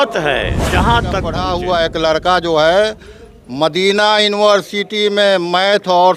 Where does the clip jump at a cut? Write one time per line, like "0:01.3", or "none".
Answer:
0:01.4